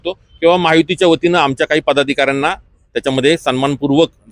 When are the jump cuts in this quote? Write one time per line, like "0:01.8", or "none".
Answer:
none

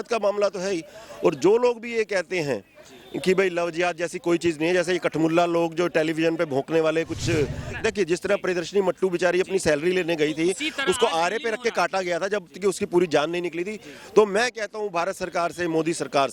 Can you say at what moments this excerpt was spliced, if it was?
0:07.7

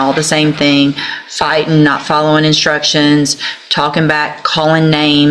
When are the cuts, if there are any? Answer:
none

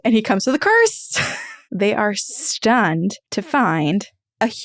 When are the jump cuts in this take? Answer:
0:01.6
0:03.3

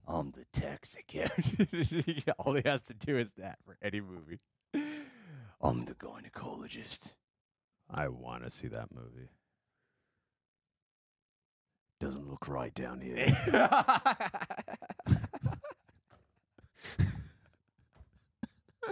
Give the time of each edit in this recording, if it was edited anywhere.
none

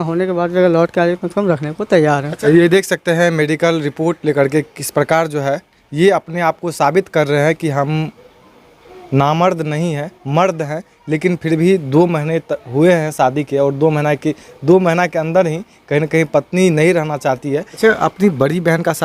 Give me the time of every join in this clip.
0:02.3
0:17.7

